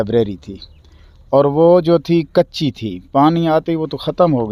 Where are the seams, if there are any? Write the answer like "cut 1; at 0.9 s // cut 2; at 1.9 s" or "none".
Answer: none